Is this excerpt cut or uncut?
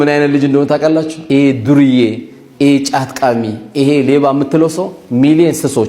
cut